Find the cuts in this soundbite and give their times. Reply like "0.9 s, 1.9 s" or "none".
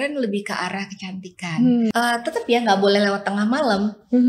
1.9 s